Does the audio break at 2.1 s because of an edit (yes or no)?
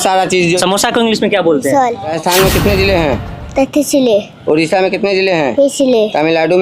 yes